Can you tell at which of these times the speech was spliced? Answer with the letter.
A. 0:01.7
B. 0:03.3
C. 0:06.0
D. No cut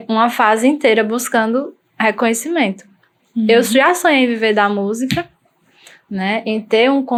D